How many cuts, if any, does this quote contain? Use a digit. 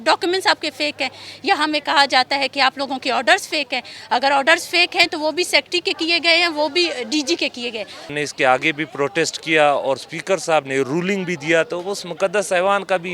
1